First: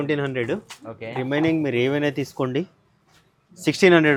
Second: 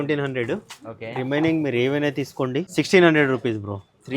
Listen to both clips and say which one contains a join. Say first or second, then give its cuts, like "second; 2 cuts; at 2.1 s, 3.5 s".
second; 1 cut; at 2.7 s